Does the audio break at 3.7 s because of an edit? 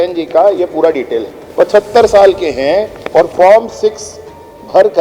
no; 1 cut; at 1.4 s

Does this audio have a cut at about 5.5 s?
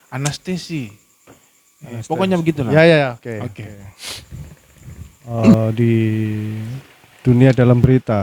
yes; 1 cut; at 5.5 s

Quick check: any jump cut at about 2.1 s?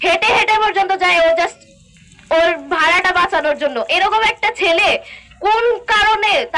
no; 0 cuts

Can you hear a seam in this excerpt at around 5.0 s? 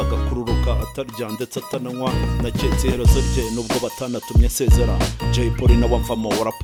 no; 0 cuts

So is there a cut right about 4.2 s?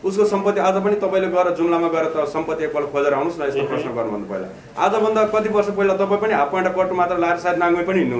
no; 0 cuts

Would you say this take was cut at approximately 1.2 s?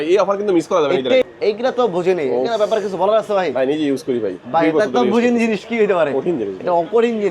yes; 1 cut; at 1.2 s

